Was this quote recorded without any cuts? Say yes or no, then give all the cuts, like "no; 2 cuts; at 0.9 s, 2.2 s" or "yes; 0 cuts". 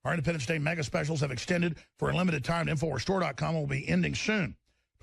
no; 1 cut; at 1.5 s